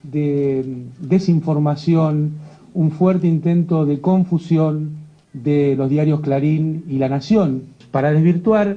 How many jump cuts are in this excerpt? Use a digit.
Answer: 1